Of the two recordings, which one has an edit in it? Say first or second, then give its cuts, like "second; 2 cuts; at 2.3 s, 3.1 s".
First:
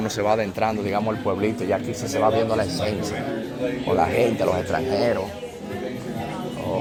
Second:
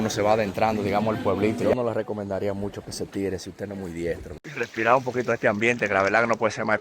second; 2 cuts; at 1.7 s, 4.4 s